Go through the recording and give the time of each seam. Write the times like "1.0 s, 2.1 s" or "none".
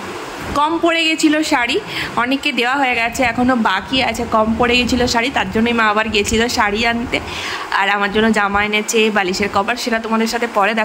none